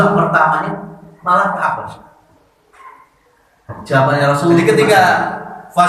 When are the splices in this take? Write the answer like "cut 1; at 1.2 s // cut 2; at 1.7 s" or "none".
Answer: cut 1; at 4.6 s

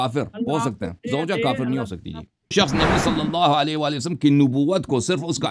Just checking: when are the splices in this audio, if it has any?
cut 1; at 2.5 s

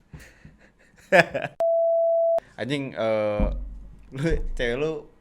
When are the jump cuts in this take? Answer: cut 1; at 2.5 s

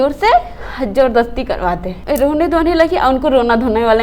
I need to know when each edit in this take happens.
cut 1; at 1.9 s

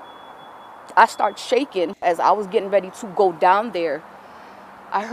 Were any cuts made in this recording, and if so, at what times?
cut 1; at 1.9 s

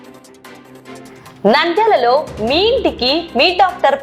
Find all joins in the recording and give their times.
cut 1; at 1.2 s

